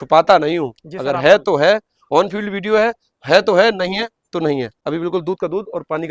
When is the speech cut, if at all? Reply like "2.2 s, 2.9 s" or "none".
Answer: none

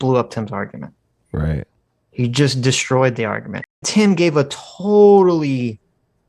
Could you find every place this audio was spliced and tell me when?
3.8 s

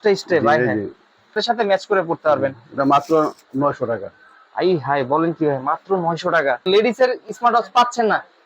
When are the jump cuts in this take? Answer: 1.4 s, 6.7 s

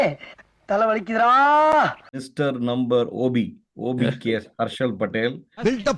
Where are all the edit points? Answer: 2.3 s

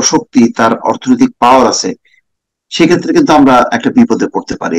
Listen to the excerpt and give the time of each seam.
none

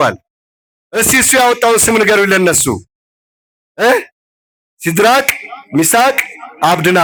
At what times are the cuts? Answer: none

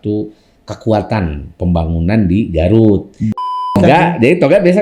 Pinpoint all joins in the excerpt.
3.8 s

